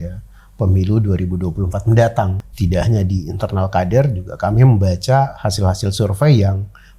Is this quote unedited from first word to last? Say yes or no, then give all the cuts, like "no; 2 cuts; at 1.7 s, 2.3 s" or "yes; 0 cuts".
no; 1 cut; at 2.4 s